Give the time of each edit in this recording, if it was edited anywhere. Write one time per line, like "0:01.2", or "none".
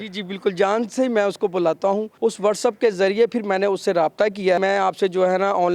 0:02.1
0:04.6

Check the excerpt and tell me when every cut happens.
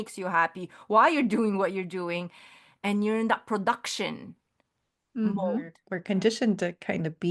0:05.8

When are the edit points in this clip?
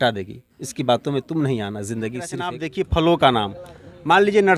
0:02.6

